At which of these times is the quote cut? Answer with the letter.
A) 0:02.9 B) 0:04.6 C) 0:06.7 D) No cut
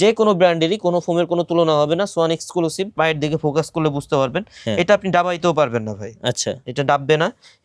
A